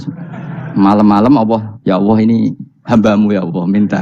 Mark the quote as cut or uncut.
cut